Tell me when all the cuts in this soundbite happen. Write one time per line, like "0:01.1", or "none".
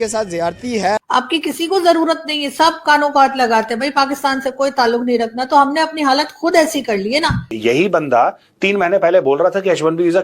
0:01.0
0:07.5